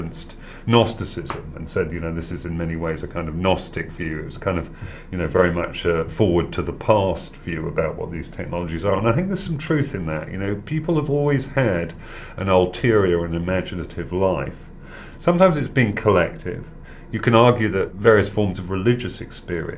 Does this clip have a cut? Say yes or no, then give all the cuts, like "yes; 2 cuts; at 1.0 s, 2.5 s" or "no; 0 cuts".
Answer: yes; 1 cut; at 3.0 s